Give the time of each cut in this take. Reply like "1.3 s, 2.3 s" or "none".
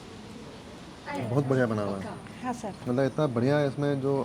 1.1 s, 2.7 s